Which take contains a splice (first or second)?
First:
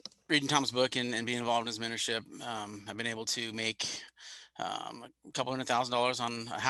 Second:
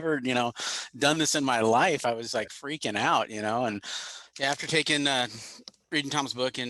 second